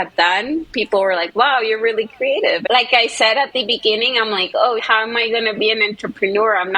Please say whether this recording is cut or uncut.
cut